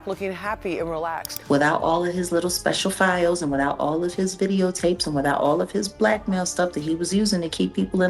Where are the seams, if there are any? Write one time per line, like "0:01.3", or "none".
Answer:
0:01.3